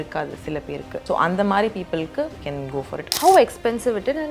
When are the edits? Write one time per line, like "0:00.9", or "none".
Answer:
0:01.0
0:02.6